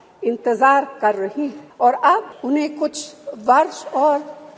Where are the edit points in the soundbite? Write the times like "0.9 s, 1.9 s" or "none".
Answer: 1.6 s, 2.3 s